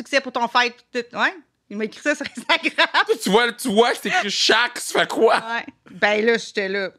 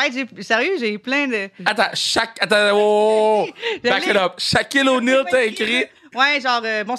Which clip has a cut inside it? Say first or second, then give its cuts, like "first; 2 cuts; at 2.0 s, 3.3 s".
second; 1 cut; at 1.5 s